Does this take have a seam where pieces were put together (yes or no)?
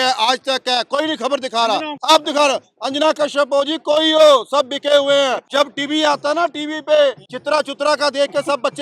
yes